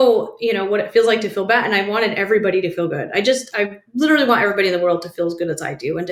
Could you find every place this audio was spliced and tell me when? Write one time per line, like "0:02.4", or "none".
none

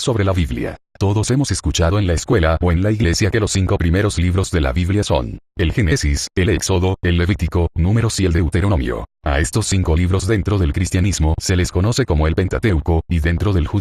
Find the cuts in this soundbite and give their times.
0:07.5

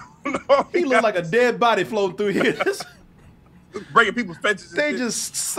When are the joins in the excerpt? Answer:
none

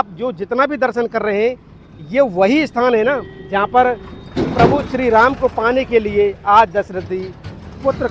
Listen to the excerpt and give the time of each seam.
none

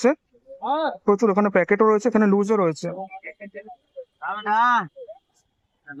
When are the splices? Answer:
none

